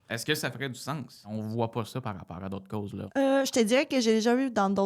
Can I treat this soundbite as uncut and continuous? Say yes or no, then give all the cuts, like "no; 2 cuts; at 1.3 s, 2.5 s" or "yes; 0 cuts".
no; 2 cuts; at 1.3 s, 3.1 s